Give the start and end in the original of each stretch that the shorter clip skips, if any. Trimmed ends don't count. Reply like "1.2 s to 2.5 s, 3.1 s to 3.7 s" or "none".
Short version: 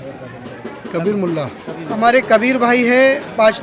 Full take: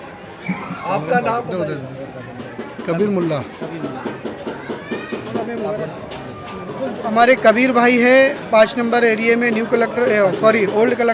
3.8 s to 7.0 s